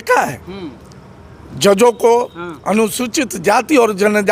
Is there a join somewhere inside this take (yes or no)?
no